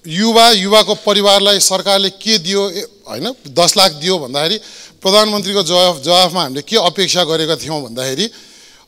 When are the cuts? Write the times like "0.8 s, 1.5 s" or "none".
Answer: none